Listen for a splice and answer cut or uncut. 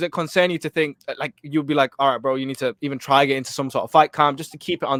uncut